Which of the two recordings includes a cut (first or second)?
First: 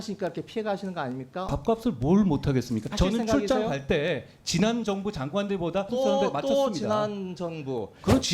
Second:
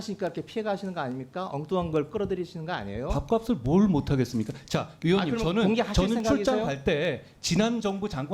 first